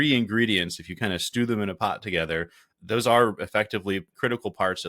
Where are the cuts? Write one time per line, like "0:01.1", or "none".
0:02.7
0:04.1